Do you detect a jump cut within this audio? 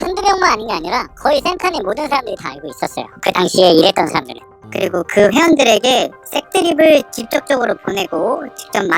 yes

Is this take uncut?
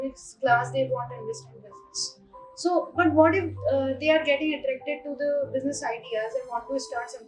yes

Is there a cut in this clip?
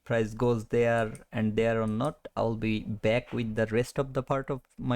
no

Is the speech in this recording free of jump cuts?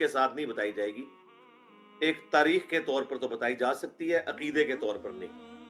yes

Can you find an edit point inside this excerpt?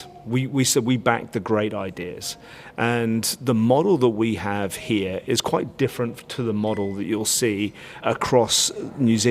yes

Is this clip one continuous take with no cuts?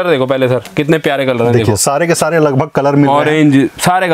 yes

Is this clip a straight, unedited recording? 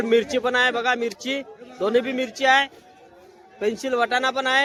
yes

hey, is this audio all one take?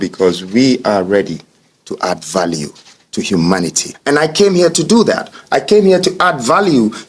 no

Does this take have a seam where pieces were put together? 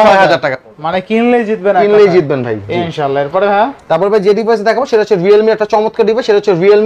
no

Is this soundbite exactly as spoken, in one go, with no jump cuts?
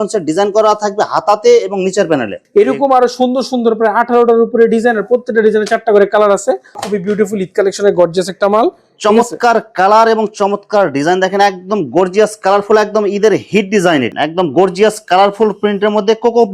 no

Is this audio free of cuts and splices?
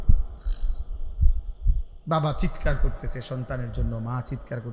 yes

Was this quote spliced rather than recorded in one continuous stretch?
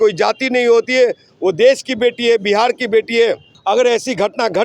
no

